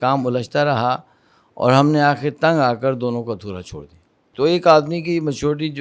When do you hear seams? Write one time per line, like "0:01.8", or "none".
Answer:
0:04.2